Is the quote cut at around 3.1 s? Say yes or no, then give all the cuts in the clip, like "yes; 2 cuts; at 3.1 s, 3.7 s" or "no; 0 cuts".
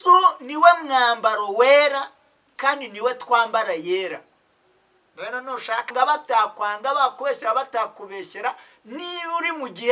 no; 1 cut; at 5.9 s